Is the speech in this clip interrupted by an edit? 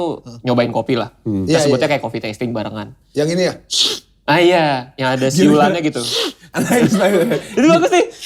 no; 0 cuts

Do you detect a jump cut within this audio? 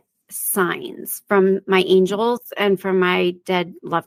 no; 0 cuts

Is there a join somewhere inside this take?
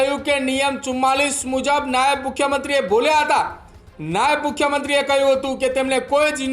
no; 0 cuts

